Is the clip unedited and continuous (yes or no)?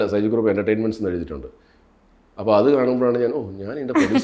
yes